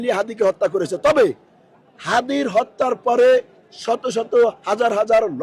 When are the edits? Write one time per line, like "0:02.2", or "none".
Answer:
none

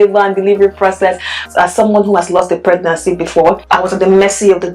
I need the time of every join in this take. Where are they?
0:01.4
0:03.7

